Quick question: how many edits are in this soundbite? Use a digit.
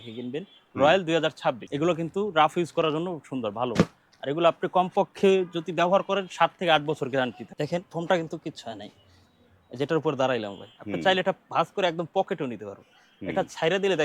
2